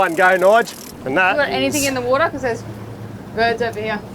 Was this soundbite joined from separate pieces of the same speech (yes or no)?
yes